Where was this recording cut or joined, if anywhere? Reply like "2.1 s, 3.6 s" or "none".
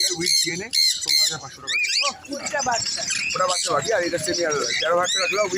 2.4 s